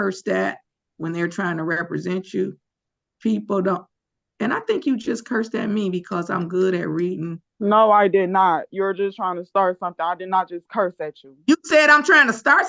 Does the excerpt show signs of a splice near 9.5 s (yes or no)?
no